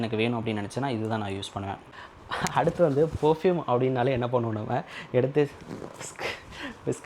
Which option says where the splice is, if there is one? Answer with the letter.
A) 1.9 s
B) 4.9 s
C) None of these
A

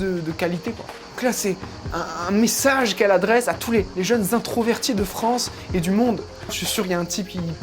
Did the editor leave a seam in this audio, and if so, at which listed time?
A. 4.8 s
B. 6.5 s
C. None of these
B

